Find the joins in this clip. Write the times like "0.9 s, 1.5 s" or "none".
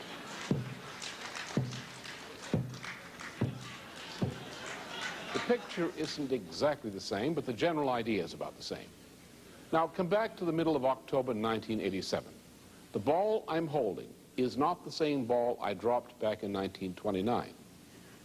none